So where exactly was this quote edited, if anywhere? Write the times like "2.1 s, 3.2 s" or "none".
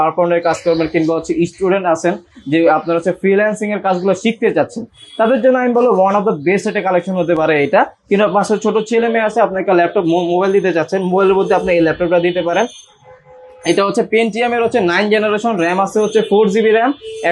none